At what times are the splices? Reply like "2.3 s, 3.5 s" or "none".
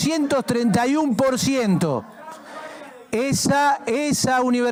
none